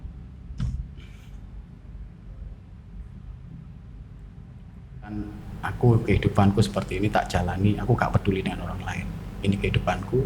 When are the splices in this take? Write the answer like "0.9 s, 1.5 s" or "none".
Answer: 5.1 s